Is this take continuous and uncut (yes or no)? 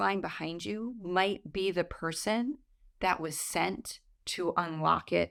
yes